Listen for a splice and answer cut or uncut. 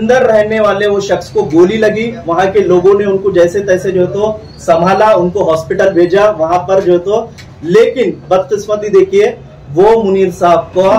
uncut